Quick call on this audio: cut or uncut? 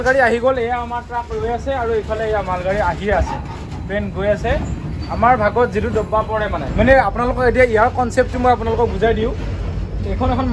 uncut